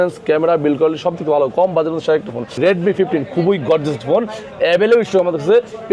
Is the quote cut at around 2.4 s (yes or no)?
yes